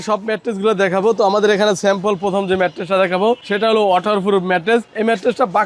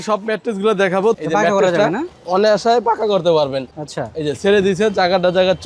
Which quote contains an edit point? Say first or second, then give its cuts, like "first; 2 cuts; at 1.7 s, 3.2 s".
second; 1 cut; at 1.2 s